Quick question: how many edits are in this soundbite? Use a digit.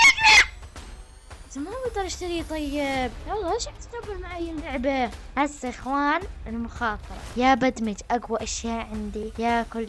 2